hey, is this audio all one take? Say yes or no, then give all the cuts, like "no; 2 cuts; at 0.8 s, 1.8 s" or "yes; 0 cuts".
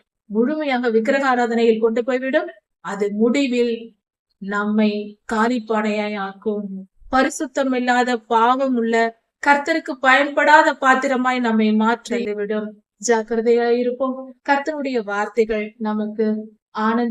no; 1 cut; at 12.2 s